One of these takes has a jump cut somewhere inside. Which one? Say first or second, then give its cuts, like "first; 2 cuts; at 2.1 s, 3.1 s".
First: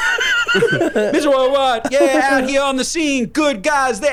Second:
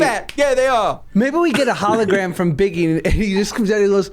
second; 1 cut; at 1.0 s